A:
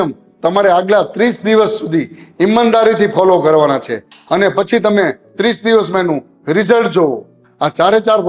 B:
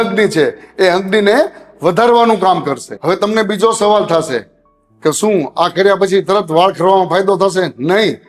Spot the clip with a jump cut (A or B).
A